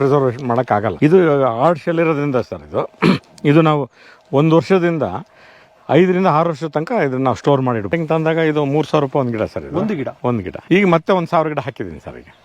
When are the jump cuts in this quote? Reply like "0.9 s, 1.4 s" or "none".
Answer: 0.9 s, 7.9 s, 10.5 s